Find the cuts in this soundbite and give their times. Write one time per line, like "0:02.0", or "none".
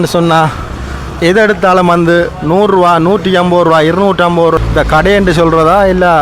0:04.6

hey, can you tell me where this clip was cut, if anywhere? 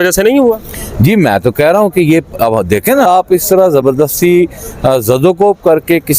0:03.1

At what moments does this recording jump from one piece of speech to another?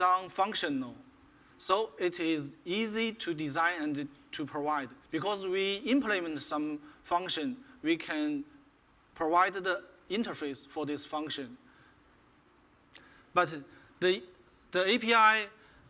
0:13.2

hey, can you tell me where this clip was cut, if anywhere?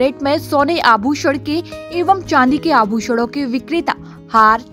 none

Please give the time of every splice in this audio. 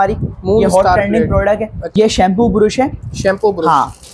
0:01.8

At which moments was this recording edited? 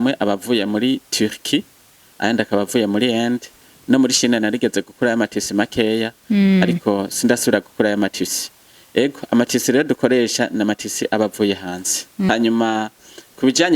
0:12.3

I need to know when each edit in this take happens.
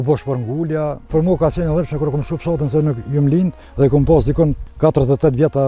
0:01.1
0:03.6
0:04.6

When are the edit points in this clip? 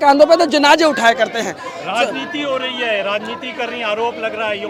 none

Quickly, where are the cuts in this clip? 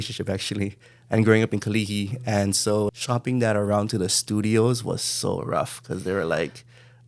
0:02.9

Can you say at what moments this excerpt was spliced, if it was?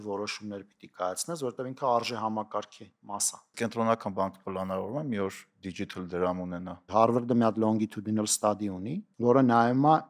0:03.5
0:06.8
0:09.0

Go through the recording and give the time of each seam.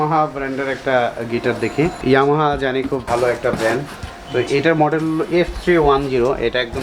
0:02.0
0:03.0

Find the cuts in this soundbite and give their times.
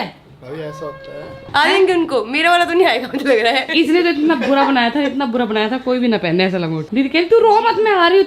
0:01.4
0:03.7
0:06.8

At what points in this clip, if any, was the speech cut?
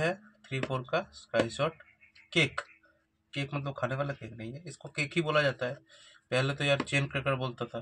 none

